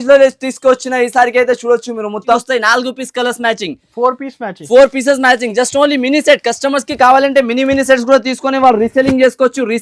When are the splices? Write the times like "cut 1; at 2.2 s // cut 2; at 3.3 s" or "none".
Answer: cut 1; at 2.4 s